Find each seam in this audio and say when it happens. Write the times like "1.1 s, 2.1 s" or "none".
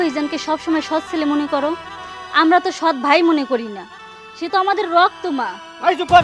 none